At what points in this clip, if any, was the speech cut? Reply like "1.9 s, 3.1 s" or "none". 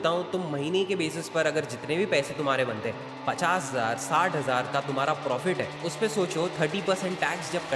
none